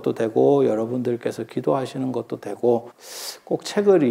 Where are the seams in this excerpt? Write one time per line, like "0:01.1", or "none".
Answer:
0:03.0